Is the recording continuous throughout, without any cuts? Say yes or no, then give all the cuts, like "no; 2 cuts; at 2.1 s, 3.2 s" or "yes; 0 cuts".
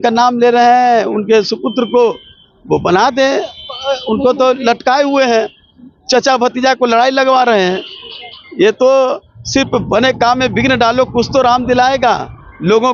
yes; 0 cuts